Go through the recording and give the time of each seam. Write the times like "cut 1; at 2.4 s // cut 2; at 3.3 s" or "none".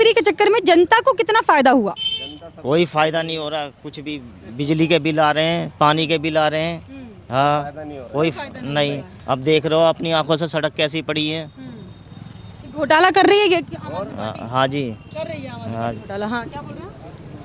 none